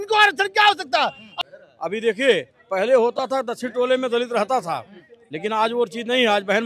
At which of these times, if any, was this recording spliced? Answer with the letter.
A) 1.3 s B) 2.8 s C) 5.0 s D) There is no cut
A